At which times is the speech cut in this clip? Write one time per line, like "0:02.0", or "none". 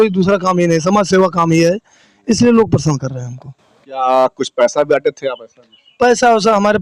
none